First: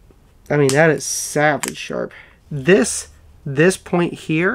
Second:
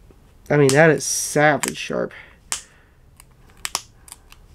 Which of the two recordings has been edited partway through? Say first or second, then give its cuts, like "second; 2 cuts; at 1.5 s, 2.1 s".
first; 1 cut; at 2.5 s